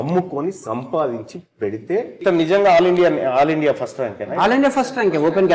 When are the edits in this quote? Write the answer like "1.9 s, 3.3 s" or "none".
2.1 s